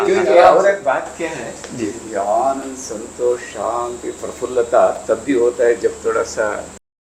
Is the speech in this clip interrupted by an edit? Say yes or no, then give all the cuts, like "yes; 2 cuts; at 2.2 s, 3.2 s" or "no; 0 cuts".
no; 0 cuts